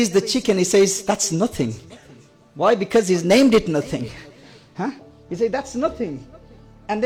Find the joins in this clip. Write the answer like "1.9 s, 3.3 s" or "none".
none